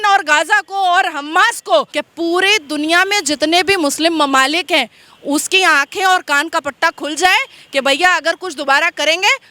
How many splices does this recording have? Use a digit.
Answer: 1